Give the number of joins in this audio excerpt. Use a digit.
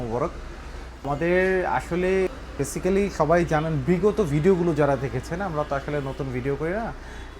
2